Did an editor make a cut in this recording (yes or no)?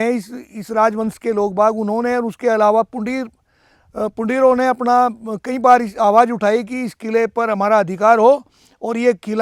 no